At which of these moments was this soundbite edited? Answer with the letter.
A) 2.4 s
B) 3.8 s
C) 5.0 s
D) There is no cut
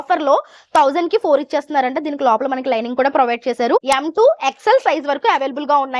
B